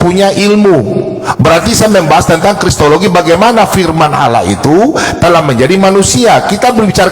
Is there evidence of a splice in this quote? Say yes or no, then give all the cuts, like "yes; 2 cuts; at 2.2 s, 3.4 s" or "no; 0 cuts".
no; 0 cuts